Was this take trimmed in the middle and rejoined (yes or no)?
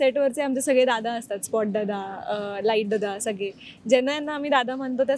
no